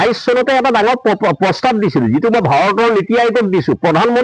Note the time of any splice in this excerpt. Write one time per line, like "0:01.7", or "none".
none